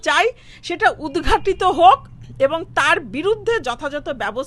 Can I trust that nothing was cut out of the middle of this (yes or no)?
yes